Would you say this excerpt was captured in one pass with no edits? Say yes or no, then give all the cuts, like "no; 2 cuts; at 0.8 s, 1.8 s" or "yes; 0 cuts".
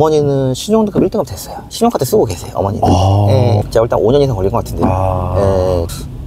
no; 1 cut; at 3.6 s